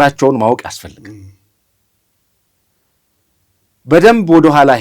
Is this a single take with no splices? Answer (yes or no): yes